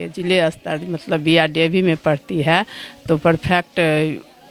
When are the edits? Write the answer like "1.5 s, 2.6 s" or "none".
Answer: none